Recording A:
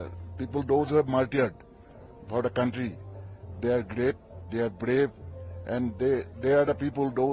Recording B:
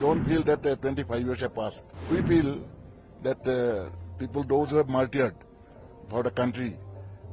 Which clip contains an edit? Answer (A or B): B